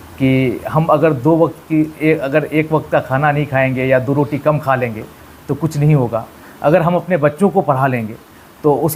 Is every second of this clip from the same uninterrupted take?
yes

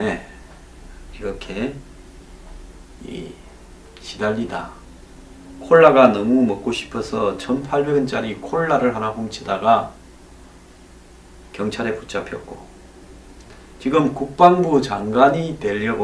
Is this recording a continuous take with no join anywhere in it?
no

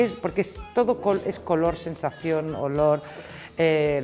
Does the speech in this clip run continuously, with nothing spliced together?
yes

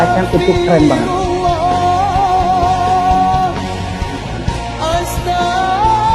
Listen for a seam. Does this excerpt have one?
yes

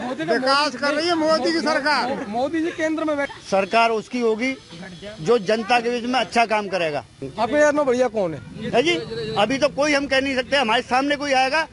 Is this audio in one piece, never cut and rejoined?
no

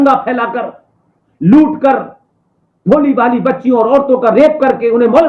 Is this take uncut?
yes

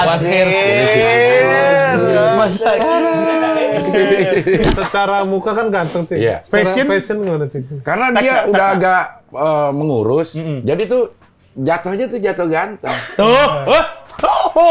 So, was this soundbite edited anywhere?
yes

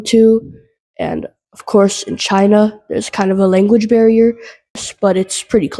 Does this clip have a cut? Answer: yes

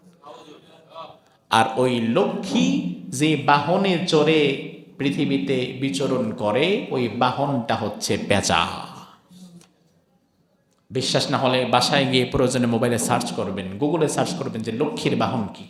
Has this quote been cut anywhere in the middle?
no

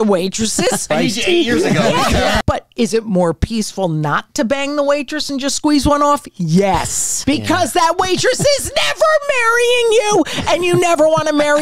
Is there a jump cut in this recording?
yes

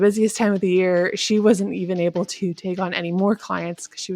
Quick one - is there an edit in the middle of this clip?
no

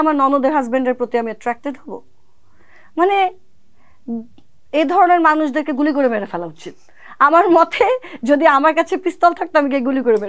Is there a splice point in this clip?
no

